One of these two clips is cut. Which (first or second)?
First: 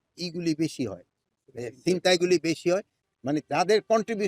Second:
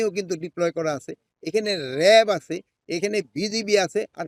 first